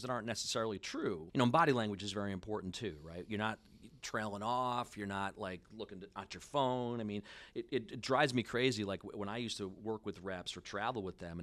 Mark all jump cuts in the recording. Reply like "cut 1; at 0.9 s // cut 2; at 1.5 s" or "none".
cut 1; at 1.2 s